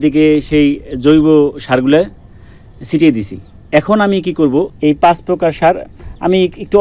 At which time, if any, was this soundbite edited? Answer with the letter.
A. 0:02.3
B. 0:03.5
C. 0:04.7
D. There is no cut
C